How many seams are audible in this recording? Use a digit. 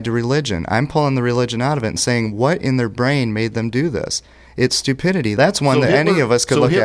1